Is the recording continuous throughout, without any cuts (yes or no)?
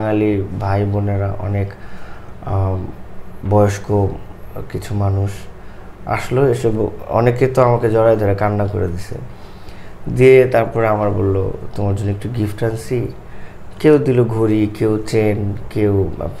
yes